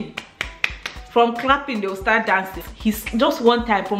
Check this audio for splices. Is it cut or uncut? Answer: cut